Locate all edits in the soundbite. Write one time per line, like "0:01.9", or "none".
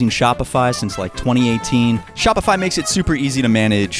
0:02.1